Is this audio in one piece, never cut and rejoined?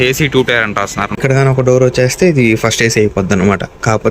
no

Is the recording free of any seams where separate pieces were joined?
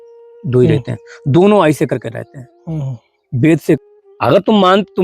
no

